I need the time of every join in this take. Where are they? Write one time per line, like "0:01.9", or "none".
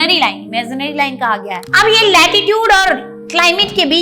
0:01.7